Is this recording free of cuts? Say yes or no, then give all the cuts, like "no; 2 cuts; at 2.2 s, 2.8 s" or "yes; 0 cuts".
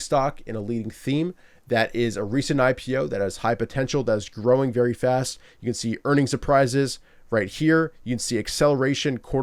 yes; 0 cuts